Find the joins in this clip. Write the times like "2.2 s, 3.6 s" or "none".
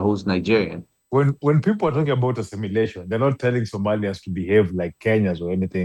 1.0 s

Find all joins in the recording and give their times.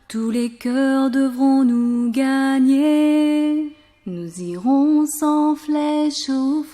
4.0 s

